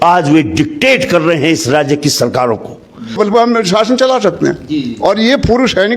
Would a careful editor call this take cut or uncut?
cut